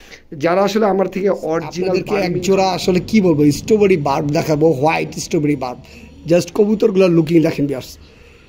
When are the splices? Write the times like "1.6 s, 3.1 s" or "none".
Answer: 2.0 s